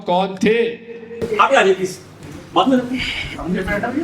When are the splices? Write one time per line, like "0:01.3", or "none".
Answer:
0:01.2